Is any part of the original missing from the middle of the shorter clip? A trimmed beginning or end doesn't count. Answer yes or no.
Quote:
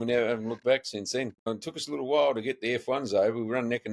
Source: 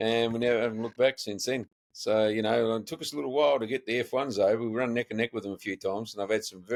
yes